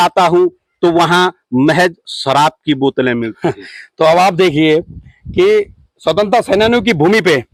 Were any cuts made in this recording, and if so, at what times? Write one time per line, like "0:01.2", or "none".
none